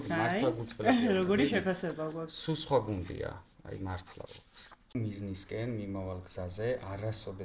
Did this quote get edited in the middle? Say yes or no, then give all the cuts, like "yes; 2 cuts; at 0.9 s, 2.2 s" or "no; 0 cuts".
yes; 1 cut; at 4.9 s